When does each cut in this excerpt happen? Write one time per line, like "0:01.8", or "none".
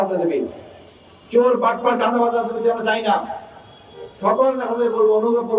none